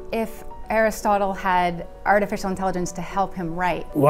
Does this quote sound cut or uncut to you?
uncut